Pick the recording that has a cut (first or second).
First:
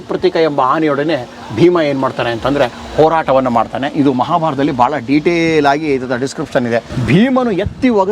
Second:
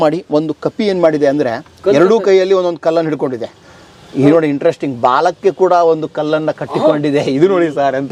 first